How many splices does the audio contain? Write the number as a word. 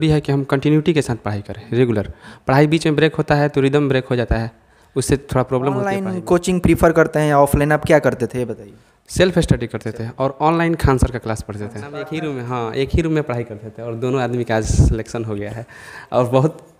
two